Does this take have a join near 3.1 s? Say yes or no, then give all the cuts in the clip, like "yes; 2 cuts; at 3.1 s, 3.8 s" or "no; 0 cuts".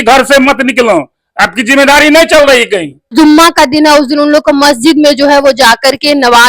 yes; 1 cut; at 3.1 s